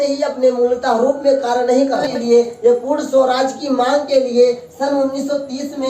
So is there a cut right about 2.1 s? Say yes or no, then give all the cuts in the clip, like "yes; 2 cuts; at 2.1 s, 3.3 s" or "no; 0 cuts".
yes; 1 cut; at 2.1 s